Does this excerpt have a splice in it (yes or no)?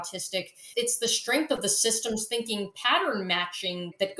no